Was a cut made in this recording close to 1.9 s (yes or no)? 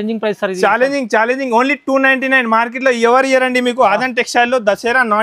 no